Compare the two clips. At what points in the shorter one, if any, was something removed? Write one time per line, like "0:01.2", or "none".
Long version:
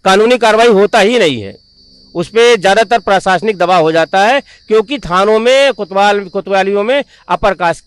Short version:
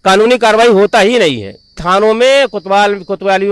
0:01.8